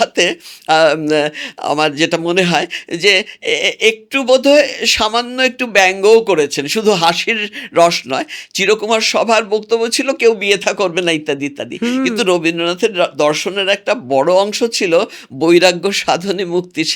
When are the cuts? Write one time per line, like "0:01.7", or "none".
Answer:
none

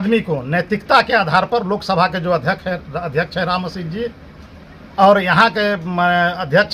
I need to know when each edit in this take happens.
none

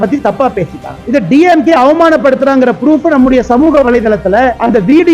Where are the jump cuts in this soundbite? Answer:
0:01.0

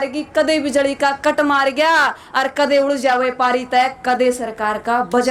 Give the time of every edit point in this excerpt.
none

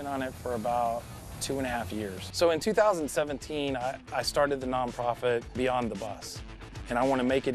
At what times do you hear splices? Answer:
0:02.2

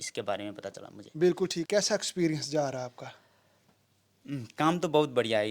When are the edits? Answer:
0:01.6

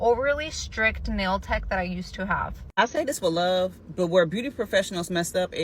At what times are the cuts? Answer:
0:02.6

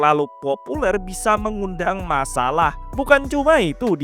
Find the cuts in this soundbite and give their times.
0:02.8

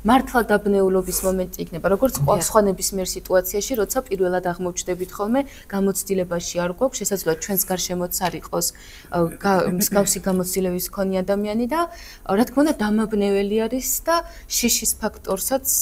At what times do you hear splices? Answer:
none

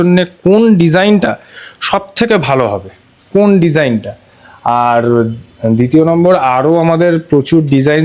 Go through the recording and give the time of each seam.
none

